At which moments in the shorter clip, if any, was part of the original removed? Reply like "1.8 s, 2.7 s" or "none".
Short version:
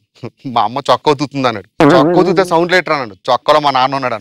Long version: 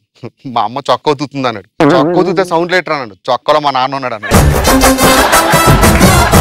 none

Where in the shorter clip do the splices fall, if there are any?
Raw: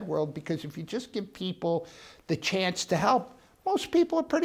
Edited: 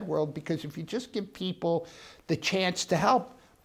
none

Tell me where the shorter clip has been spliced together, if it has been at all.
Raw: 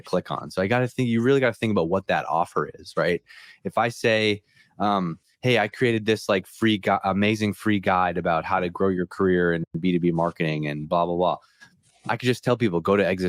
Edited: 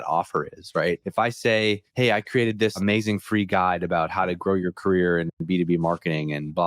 1.1 s, 1.9 s, 2.8 s

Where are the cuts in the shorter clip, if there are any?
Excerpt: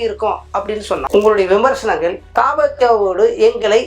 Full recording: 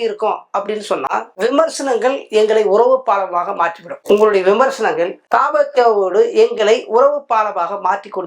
1.0 s

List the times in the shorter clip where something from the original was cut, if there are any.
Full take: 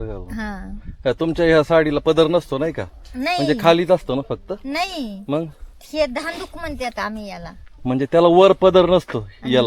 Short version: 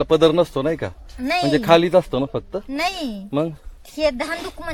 none

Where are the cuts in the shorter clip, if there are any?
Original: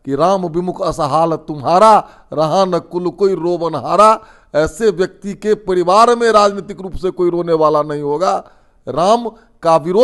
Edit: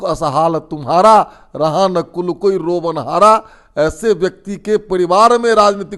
none

